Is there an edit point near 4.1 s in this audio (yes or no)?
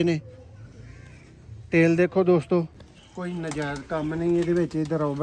no